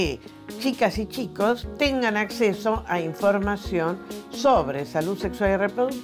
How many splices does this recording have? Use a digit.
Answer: 1